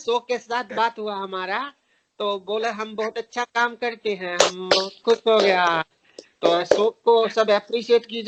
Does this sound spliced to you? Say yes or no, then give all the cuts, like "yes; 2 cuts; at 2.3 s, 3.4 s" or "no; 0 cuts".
no; 0 cuts